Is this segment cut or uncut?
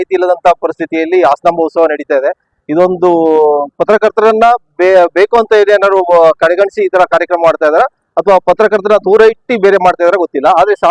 uncut